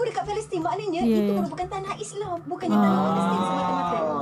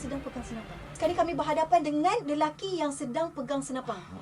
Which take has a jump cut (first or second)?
second